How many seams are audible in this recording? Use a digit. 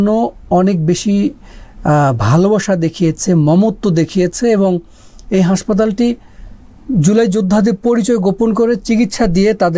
0